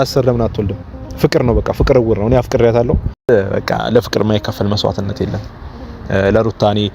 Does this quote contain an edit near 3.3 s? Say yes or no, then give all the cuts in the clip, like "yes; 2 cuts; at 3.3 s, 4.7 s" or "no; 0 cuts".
yes; 1 cut; at 3.3 s